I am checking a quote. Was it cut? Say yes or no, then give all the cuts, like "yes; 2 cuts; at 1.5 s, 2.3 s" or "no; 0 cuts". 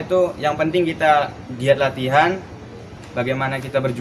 yes; 1 cut; at 3.0 s